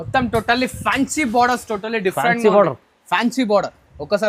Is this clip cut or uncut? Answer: uncut